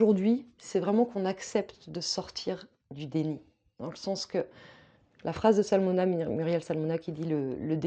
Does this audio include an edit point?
no; 0 cuts

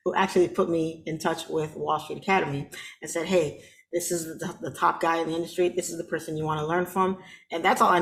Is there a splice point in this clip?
no; 0 cuts

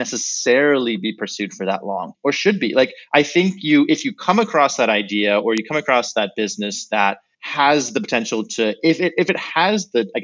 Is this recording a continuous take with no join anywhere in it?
yes; 0 cuts

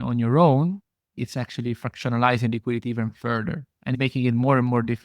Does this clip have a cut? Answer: yes; 1 cut; at 1.2 s

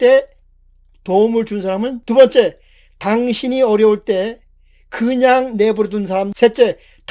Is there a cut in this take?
yes; 2 cuts; at 2.0 s, 6.3 s

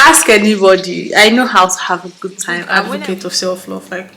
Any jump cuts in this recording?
yes; 1 cut; at 2.7 s

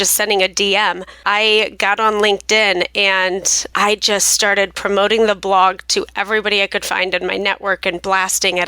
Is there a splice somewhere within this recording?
yes; 2 cuts; at 1.1 s, 3.7 s

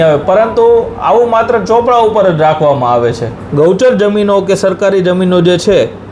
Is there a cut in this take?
yes; 1 cut; at 3.4 s

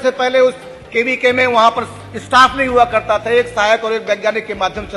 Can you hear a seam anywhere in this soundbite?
no; 0 cuts

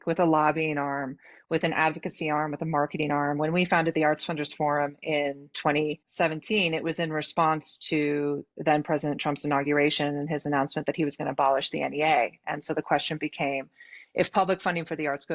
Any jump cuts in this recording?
yes; 1 cut; at 6.0 s

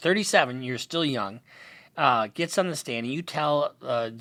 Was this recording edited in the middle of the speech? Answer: no; 0 cuts

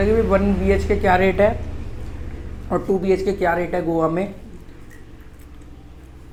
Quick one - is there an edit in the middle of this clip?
no; 0 cuts

